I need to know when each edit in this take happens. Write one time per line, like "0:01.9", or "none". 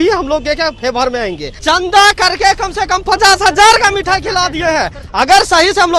0:01.6
0:05.0